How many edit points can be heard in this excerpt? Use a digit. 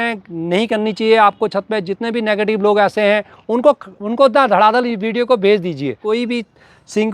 1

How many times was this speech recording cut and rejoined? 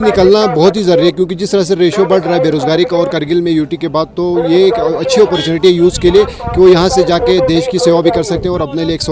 0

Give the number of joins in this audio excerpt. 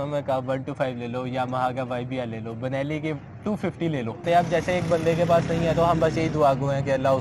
1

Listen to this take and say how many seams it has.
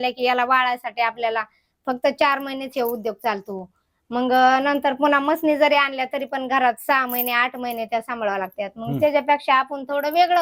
0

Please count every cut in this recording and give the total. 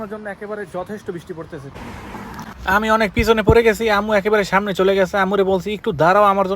1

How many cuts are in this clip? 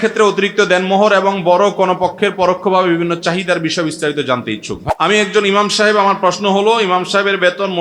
1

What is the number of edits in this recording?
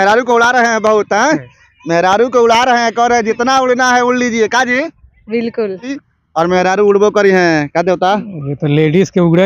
1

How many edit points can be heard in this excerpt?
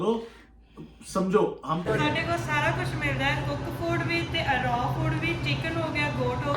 1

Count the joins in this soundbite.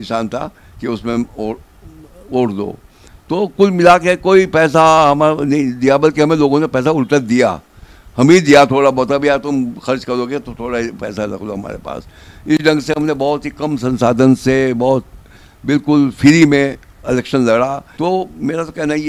1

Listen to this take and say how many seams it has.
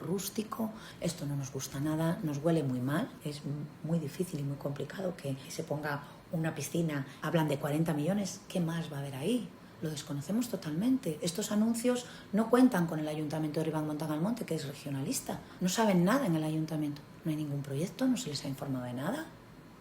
5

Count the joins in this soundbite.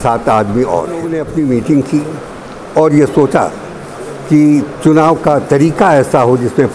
1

